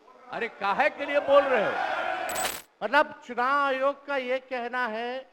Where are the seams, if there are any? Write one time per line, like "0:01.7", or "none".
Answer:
0:02.3